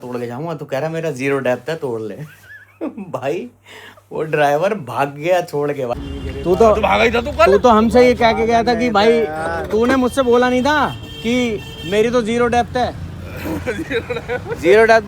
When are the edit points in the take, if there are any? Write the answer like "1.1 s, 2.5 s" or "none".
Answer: 5.9 s